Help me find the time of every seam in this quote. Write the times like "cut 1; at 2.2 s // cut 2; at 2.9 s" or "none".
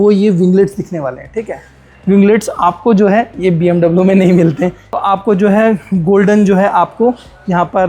cut 1; at 4.8 s